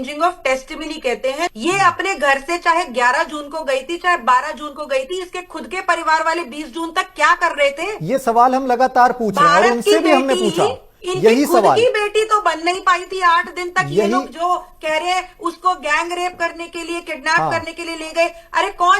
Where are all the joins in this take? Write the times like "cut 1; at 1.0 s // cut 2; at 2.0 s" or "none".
cut 1; at 1.5 s